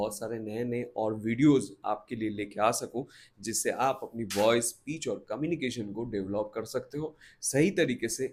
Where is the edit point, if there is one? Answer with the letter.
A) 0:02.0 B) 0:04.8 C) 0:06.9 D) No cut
D